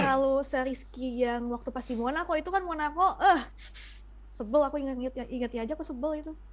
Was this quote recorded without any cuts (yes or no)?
yes